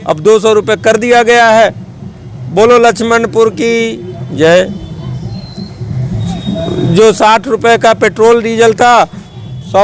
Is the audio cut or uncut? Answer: uncut